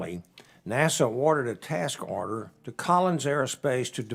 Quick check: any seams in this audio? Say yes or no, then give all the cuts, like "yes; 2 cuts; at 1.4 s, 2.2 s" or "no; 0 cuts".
no; 0 cuts